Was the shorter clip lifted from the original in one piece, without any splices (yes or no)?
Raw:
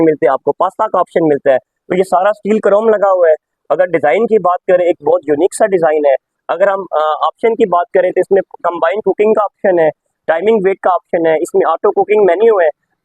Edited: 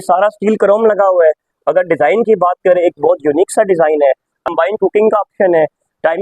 no